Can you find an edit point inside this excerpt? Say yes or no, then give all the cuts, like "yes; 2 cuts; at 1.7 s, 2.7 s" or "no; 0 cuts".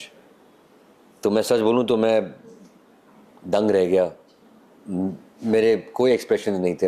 no; 0 cuts